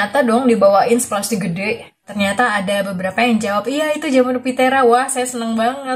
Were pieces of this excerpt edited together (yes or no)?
yes